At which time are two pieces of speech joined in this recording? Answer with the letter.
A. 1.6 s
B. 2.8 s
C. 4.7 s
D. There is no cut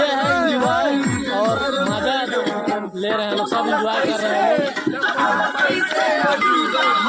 C